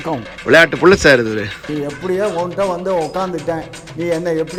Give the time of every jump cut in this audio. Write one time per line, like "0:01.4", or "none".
none